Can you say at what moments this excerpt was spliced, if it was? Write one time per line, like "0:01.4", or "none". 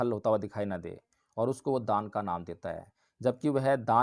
none